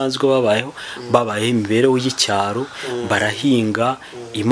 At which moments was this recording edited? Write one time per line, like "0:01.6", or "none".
none